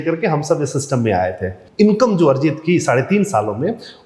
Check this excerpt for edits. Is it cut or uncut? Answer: cut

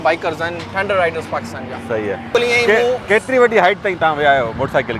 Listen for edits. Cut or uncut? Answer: cut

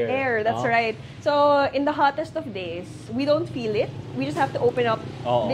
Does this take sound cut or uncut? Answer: uncut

